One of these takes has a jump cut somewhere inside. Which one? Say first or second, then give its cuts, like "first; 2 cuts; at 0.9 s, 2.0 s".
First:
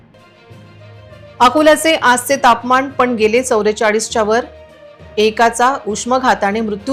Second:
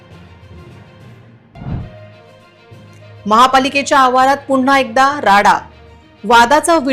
second; 1 cut; at 1.4 s